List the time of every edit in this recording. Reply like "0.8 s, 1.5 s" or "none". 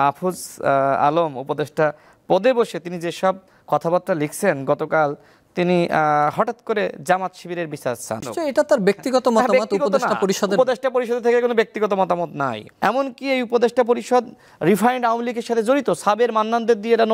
12.6 s